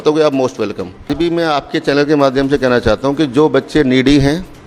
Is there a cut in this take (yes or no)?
yes